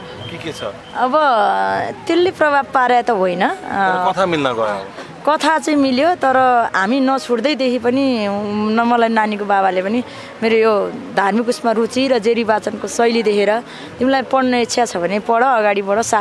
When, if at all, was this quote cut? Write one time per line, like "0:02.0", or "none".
none